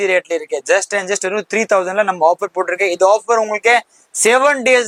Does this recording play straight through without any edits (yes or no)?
yes